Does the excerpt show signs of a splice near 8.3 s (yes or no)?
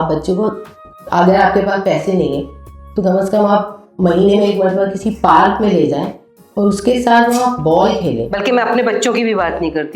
yes